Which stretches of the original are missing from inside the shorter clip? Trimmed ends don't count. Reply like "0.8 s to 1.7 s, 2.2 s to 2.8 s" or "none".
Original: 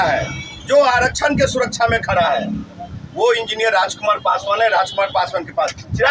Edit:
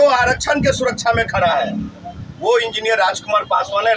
none

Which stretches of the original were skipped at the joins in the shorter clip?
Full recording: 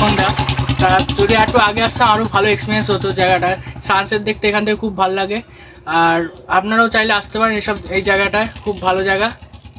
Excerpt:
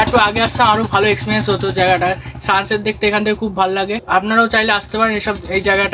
5.4 s to 6.4 s

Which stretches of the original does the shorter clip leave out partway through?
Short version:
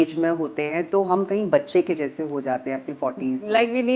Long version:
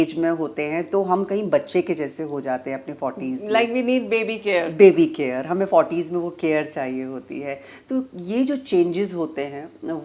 none

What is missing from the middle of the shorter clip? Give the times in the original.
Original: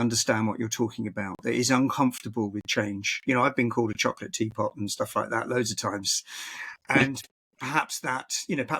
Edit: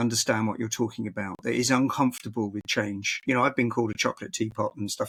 none

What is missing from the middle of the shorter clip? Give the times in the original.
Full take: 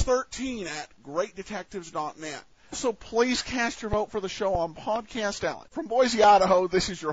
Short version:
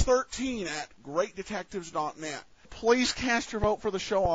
2.7 s to 3.0 s

